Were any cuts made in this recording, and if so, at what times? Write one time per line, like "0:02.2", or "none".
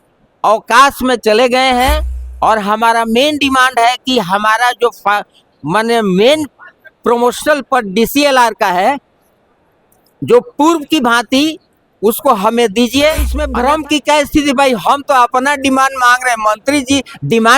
0:13.4